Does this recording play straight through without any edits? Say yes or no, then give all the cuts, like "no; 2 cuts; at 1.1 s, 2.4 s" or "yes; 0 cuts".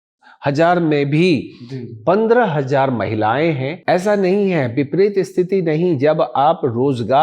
no; 1 cut; at 3.7 s